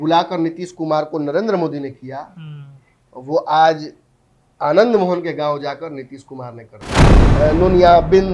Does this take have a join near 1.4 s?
no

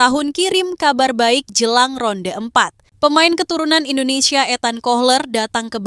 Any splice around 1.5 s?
no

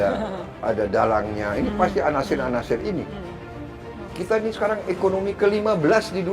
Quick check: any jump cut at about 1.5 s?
no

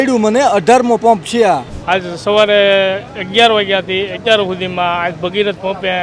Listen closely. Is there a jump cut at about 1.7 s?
yes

